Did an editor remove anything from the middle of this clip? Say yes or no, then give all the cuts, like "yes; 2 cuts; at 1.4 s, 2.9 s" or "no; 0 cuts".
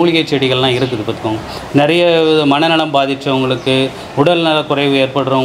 no; 0 cuts